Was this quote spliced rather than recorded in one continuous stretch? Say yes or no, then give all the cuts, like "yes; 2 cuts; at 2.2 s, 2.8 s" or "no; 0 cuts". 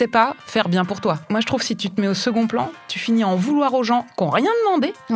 yes; 1 cut; at 1.2 s